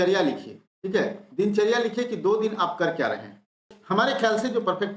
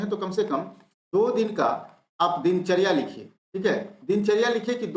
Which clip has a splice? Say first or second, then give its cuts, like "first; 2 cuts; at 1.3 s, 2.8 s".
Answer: first; 1 cut; at 3.7 s